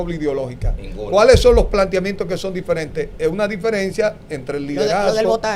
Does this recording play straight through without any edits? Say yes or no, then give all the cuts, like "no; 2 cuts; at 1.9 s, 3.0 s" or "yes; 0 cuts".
yes; 0 cuts